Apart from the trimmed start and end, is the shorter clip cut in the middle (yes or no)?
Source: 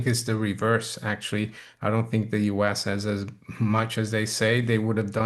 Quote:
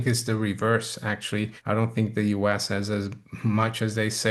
yes